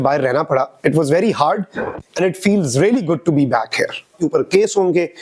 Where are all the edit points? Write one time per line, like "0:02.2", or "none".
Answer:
0:04.1